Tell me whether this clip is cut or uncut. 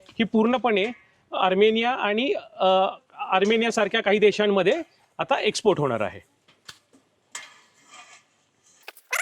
uncut